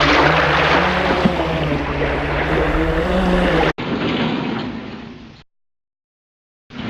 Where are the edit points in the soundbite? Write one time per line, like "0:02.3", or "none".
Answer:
none

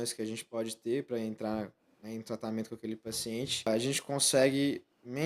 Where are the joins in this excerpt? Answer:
0:03.7

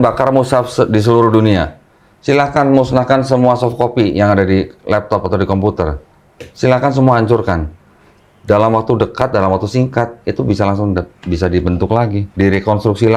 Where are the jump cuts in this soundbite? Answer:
none

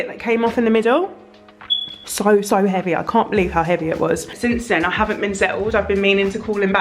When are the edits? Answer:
0:04.2

